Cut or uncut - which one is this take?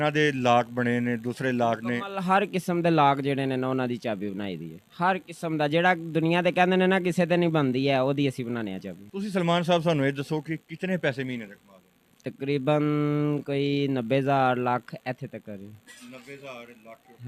uncut